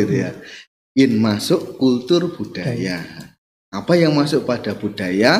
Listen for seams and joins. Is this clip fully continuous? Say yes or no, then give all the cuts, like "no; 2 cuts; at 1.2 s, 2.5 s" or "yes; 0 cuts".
yes; 0 cuts